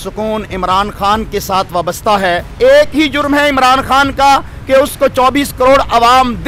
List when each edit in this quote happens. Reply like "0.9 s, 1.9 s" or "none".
2.5 s